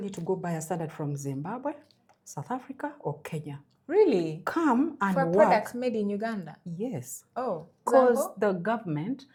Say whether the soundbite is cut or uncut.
uncut